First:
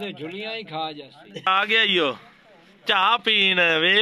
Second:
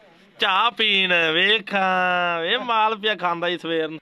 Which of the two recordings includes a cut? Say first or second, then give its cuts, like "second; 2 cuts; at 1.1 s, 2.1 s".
first; 1 cut; at 1.5 s